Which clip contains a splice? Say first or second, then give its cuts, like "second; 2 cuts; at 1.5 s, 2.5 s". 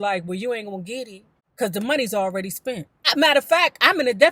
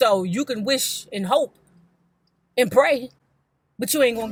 first; 1 cut; at 3.0 s